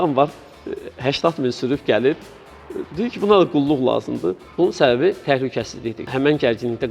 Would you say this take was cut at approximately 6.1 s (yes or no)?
yes